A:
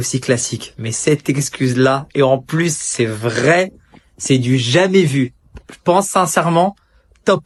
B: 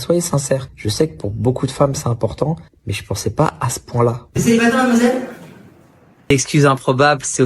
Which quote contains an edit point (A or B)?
B